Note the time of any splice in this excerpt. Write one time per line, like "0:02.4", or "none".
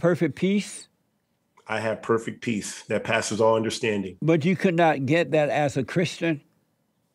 none